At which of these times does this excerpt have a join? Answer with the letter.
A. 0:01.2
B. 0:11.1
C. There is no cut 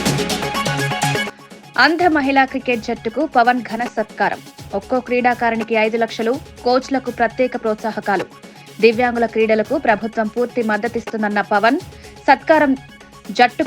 A